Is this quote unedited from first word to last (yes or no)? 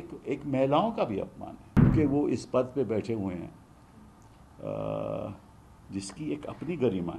no